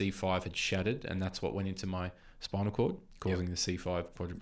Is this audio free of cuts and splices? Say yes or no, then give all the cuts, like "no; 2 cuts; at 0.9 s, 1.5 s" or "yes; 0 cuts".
yes; 0 cuts